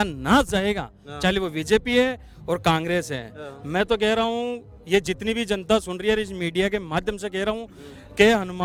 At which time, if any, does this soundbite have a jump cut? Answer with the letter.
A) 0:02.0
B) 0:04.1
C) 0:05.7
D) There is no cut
D